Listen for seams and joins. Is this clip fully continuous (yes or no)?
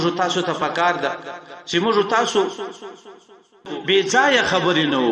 no